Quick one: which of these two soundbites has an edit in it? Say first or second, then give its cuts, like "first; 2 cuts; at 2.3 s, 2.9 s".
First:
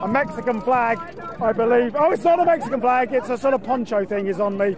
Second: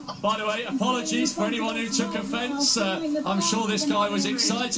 second; 1 cut; at 3.5 s